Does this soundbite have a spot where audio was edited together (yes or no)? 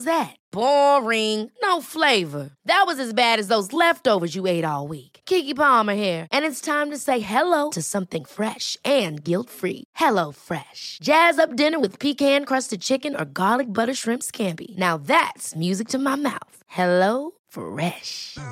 no